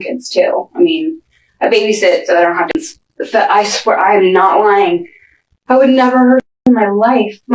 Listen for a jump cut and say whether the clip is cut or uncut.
cut